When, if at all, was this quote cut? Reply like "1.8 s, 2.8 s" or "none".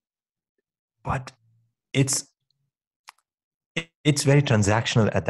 none

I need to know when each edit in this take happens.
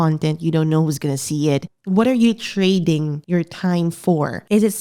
1.7 s, 3.1 s

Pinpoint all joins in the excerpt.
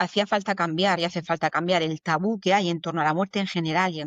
none

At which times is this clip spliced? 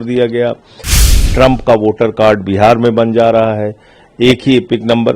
0.9 s

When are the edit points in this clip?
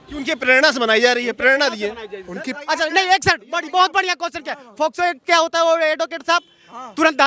2.5 s

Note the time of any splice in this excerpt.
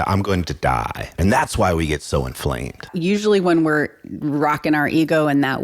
1.1 s, 2.9 s

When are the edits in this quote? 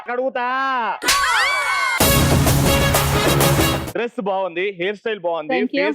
3.9 s

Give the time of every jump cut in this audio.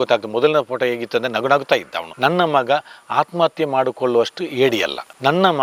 none

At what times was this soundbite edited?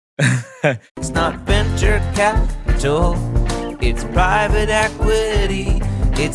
1.0 s

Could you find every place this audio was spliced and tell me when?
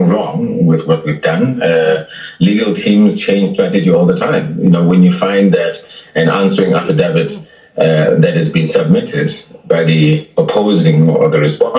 none

